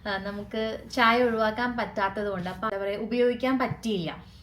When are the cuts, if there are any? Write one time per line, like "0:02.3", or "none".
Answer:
0:02.7